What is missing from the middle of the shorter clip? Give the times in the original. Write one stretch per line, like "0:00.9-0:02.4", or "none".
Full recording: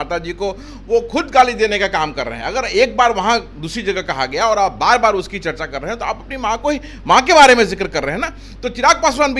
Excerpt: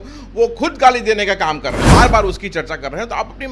0:02.4-0:04.8